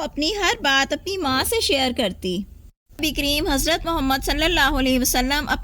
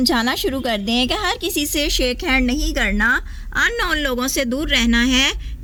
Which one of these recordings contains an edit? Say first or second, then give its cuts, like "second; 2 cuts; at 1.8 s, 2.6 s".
first; 1 cut; at 3.0 s